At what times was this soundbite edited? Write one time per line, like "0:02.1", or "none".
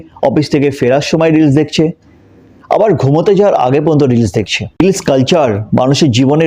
0:04.6